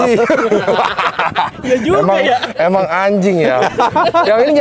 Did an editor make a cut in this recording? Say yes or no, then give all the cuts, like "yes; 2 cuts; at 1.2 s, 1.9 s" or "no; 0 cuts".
no; 0 cuts